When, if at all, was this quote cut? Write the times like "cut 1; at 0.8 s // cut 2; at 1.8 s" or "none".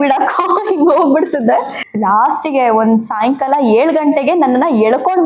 cut 1; at 1.8 s